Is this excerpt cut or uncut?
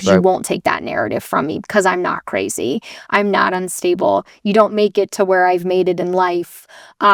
uncut